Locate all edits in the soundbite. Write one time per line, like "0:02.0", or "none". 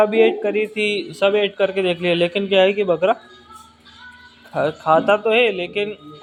none